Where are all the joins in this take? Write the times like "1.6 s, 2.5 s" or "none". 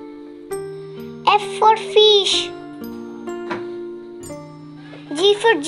1.2 s, 2.5 s, 4.6 s